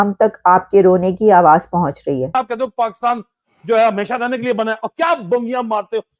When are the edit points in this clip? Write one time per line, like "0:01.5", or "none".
0:02.3